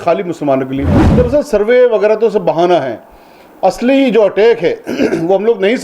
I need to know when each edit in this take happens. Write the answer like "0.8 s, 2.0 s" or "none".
1.1 s